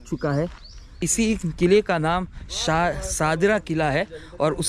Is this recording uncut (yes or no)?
no